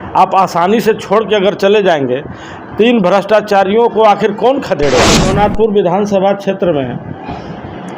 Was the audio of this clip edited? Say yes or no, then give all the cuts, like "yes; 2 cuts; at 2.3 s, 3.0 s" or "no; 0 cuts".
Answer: yes; 1 cut; at 5.3 s